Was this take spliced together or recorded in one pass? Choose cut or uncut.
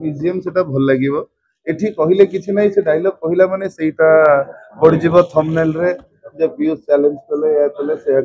uncut